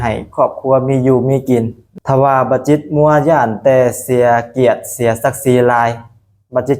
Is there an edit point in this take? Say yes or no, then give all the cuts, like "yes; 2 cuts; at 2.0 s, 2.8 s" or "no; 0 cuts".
yes; 1 cut; at 2.0 s